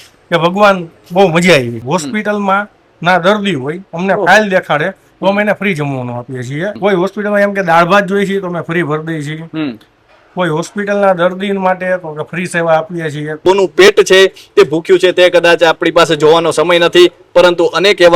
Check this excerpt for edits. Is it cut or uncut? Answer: cut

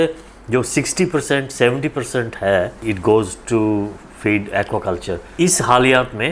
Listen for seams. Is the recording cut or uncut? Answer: cut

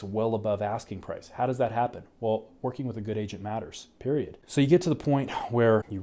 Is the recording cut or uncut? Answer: uncut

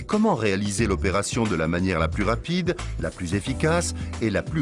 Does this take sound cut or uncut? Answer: uncut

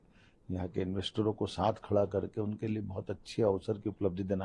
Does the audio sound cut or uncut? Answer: uncut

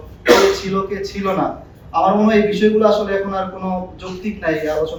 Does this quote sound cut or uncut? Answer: uncut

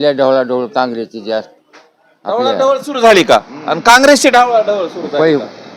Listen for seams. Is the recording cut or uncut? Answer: uncut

